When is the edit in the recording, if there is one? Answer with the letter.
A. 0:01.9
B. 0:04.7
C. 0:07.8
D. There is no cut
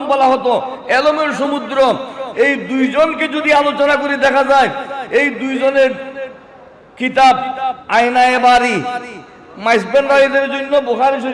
C